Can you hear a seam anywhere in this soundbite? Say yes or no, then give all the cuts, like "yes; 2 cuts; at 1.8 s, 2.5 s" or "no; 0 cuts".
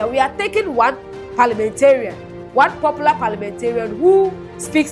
no; 0 cuts